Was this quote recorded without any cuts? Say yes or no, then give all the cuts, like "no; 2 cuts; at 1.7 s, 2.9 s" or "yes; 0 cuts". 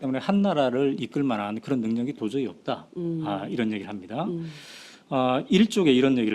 yes; 0 cuts